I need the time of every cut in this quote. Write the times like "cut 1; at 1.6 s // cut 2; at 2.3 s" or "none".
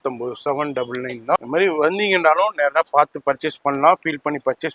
cut 1; at 1.4 s